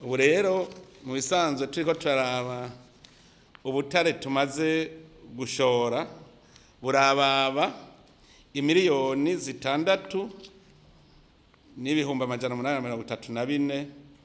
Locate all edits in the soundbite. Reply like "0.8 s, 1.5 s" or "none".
none